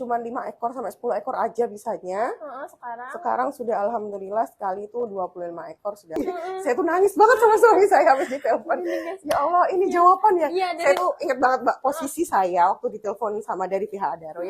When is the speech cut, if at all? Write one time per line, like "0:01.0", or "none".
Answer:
0:06.2